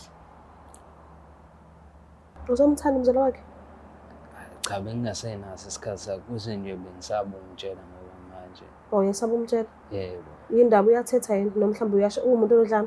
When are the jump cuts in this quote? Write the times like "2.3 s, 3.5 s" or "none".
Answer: 2.3 s

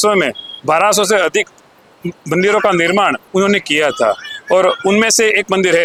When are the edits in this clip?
none

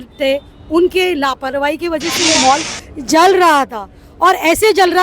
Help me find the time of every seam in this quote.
2.2 s

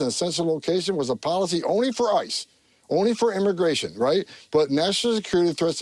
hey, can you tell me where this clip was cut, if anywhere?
none

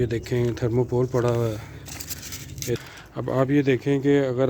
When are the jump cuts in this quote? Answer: 2.8 s

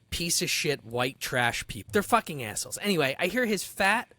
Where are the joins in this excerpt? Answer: 1.8 s

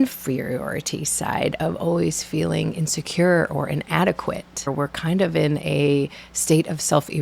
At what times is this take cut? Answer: 4.7 s

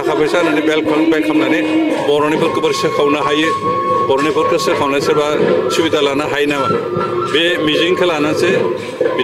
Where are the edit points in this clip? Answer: none

